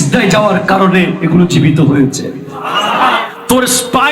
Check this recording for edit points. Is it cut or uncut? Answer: cut